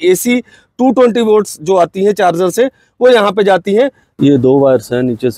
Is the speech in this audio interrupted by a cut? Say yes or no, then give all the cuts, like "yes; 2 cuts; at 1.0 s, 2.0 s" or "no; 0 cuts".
yes; 1 cut; at 4.0 s